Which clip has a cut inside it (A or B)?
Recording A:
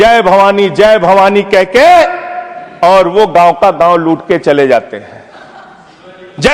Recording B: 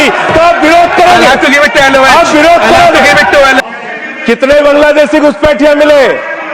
B